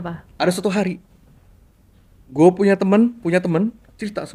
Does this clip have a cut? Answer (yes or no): no